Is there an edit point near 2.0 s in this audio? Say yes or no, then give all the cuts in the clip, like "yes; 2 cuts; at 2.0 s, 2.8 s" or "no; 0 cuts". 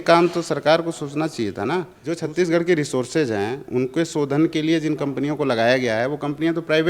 yes; 1 cut; at 2.0 s